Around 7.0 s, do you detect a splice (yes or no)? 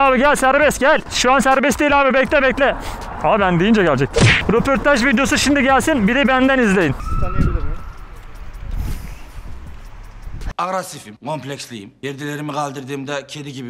yes